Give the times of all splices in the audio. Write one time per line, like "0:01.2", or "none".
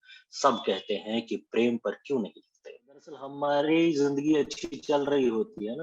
0:03.4